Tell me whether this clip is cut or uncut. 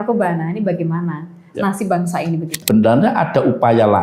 cut